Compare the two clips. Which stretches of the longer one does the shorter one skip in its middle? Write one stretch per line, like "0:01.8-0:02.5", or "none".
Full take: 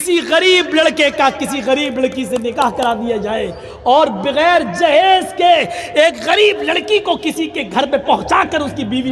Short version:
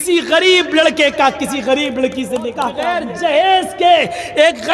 0:02.9-0:04.5